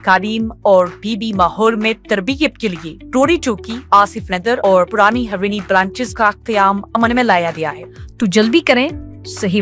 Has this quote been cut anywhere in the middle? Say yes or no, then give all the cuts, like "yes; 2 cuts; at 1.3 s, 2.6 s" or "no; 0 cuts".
yes; 1 cut; at 7.8 s